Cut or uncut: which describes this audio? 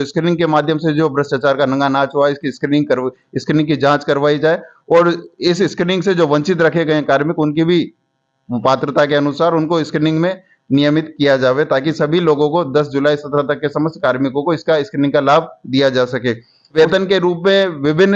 cut